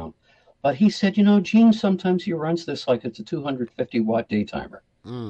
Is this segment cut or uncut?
uncut